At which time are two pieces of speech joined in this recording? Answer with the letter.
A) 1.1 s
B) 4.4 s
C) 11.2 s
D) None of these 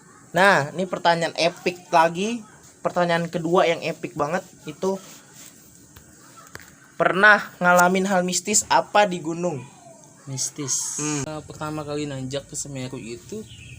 C